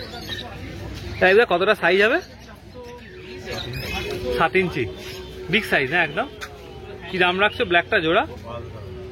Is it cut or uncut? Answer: uncut